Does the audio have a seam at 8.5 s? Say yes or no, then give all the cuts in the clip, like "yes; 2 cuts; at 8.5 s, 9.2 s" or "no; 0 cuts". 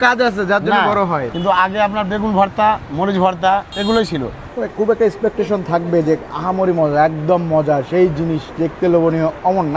no; 3 cuts; at 1.3 s, 3.7 s, 4.4 s